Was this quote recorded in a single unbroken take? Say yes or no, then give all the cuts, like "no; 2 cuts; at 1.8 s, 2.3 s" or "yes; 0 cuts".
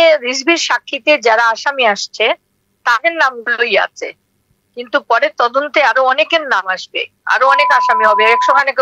yes; 0 cuts